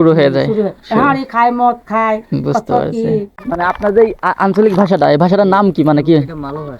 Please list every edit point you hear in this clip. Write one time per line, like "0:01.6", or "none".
0:03.4

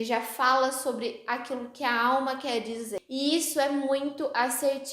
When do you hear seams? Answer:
0:03.0

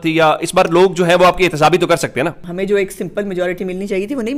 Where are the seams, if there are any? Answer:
0:02.4

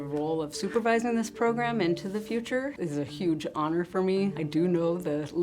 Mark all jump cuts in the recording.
0:02.7
0:04.4

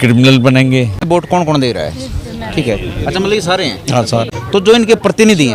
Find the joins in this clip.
0:01.1
0:04.4

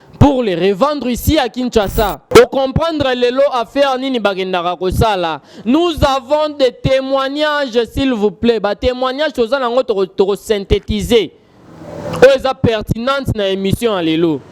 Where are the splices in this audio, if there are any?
0:02.2

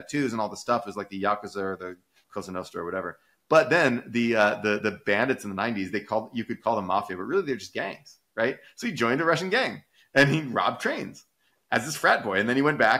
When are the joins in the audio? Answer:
none

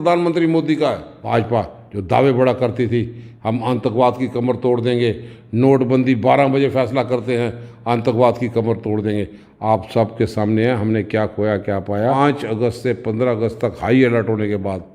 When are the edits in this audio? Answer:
0:01.1
0:12.2

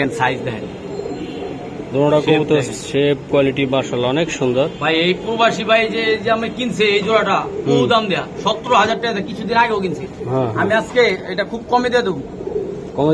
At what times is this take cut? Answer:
none

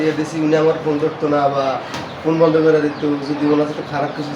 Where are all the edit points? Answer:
none

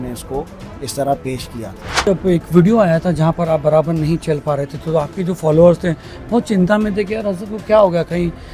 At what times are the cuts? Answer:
0:02.1

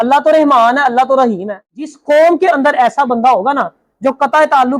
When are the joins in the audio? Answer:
0:01.9

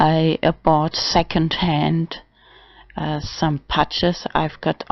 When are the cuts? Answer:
0:01.9

